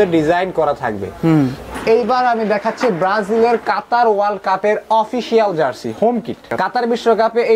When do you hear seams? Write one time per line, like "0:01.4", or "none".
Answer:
0:01.7
0:06.4